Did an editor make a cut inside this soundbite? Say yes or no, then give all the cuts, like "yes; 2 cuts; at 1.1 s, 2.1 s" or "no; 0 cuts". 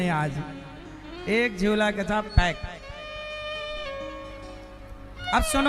no; 0 cuts